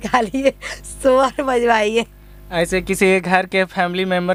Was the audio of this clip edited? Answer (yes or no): no